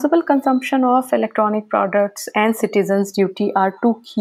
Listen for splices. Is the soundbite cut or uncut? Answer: uncut